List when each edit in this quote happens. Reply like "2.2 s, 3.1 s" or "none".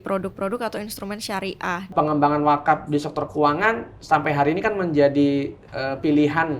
1.9 s